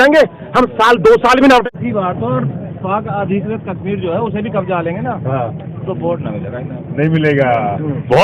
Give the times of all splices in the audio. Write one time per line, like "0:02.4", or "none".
0:01.6